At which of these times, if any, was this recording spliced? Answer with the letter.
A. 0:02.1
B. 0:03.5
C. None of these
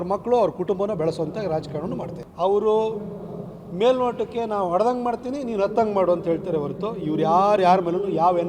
A